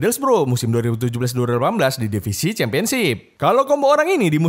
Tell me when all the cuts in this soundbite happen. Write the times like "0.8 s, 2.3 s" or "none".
3.3 s